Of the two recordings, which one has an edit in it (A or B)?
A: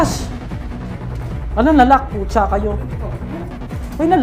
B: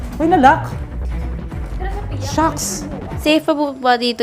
B